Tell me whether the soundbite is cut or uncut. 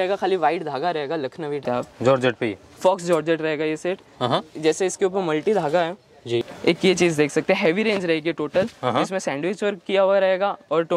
cut